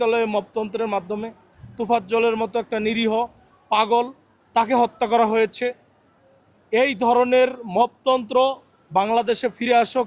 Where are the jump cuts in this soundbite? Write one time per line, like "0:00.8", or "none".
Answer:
none

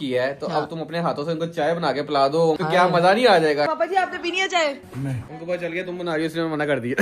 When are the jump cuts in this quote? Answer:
0:02.6
0:03.7
0:05.2

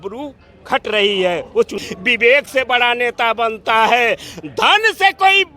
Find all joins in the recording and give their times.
0:01.7

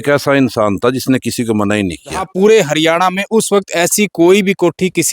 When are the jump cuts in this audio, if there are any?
0:02.3

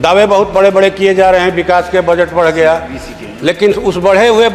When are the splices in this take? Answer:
none

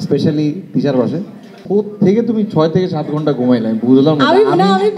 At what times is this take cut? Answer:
0:01.6

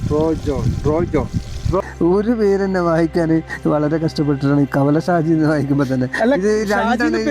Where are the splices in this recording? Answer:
0:01.8

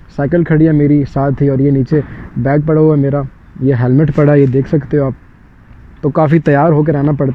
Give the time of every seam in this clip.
none

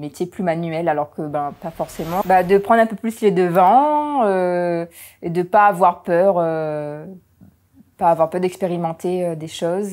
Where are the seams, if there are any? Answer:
0:02.2

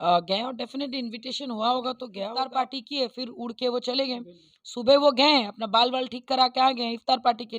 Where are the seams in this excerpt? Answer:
0:02.3

